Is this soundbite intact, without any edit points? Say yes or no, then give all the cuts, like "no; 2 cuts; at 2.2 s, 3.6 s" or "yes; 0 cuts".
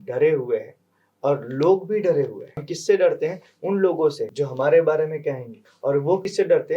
no; 3 cuts; at 2.7 s, 4.2 s, 5.9 s